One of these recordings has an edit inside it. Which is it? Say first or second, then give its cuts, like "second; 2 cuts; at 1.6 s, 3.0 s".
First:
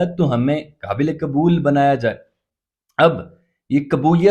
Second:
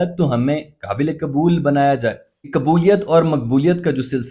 second; 1 cut; at 2.5 s